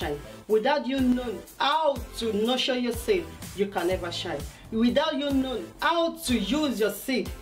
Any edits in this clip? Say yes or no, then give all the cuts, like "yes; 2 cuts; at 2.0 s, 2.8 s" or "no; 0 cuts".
yes; 1 cut; at 3.8 s